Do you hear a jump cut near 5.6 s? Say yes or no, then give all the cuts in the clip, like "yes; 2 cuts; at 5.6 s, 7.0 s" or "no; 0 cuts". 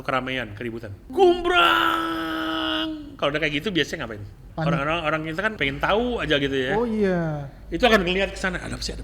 yes; 3 cuts; at 1.0 s, 4.4 s, 5.6 s